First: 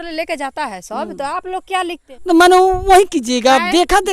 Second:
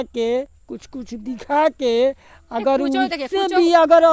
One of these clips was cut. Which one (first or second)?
first